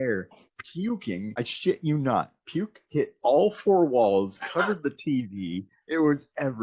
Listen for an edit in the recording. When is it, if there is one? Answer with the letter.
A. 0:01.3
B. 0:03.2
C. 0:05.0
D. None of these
A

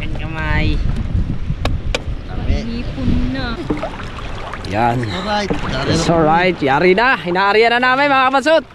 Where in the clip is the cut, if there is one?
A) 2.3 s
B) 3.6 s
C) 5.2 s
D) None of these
B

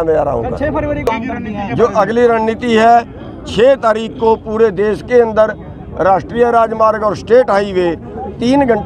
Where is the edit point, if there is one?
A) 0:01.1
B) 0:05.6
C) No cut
A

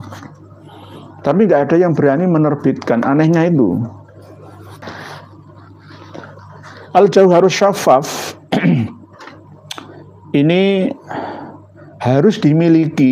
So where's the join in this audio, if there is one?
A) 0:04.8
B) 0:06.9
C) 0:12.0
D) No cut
A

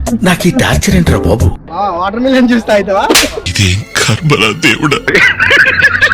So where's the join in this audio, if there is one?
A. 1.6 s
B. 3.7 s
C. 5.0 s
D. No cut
D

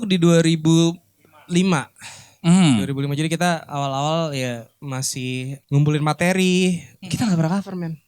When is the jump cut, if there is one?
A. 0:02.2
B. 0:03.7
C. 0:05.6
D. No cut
C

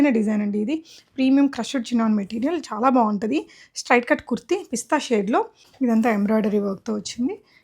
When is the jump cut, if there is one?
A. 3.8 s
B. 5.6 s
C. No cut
B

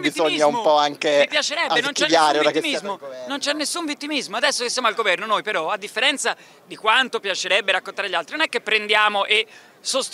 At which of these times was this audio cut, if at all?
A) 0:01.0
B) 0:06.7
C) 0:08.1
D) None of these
D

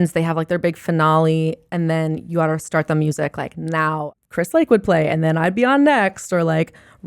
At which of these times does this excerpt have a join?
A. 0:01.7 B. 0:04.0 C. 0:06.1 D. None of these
B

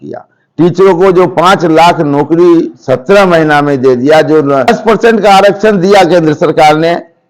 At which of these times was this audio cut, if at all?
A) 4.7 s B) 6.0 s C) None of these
A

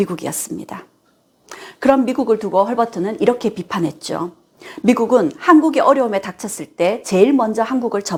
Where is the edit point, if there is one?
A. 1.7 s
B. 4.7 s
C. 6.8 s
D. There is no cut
D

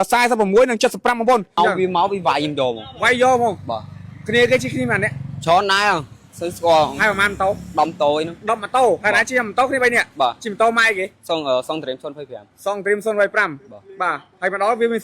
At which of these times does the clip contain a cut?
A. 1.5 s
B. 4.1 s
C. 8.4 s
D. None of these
A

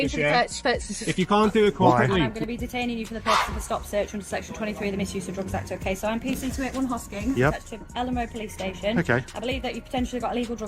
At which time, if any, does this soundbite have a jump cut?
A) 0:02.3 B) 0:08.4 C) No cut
A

